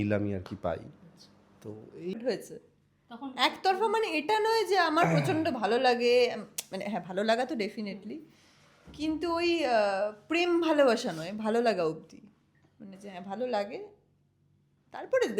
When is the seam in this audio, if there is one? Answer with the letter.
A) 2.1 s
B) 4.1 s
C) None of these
A